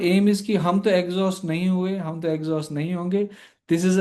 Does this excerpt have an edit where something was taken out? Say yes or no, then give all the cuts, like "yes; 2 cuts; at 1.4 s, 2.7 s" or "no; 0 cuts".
no; 0 cuts